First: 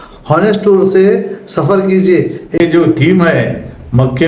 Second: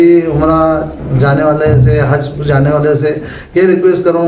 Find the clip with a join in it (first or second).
first